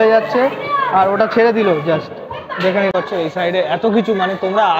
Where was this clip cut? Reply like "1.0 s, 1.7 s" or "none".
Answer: 2.9 s